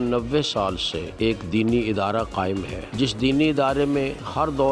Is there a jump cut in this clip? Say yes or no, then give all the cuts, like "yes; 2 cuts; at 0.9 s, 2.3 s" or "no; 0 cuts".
yes; 2 cuts; at 1.0 s, 2.8 s